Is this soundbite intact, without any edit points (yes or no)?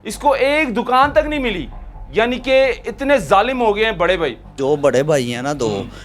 no